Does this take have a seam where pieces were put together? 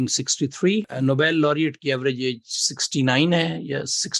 yes; 1 cut; at 0.9 s

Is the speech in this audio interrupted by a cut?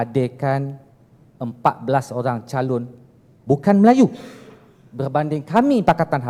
no; 0 cuts

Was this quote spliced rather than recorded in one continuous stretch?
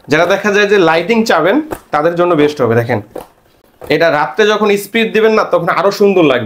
no; 0 cuts

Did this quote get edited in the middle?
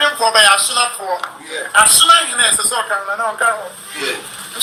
no; 0 cuts

